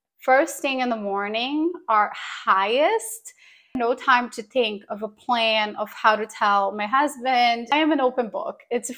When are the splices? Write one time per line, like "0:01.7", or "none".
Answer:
0:03.7
0:07.6